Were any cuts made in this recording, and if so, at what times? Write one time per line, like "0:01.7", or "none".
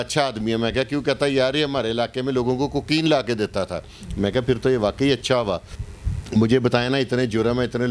0:05.7